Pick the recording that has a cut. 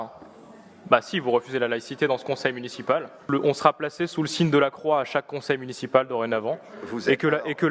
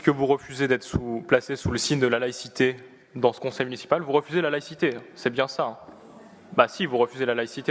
first; 1 cut; at 3.3 s

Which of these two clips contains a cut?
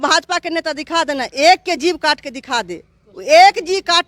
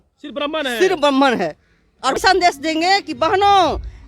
second; 1 cut; at 2.2 s

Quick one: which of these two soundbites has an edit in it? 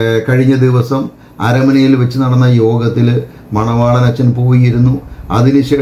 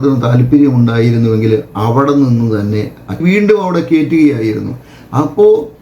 second; 1 cut; at 3.2 s

